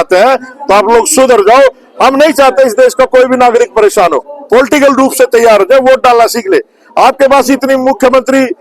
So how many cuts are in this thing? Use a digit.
1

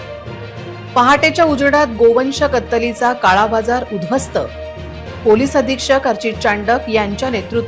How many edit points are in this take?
1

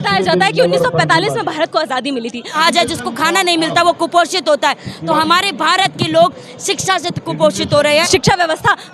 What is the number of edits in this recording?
2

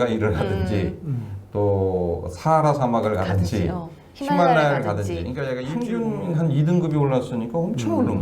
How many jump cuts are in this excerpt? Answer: 1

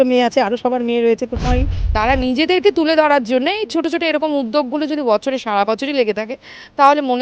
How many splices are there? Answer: 1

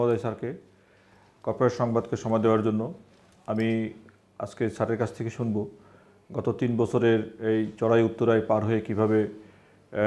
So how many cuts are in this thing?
0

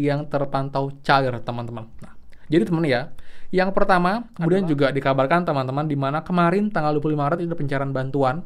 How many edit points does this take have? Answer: 1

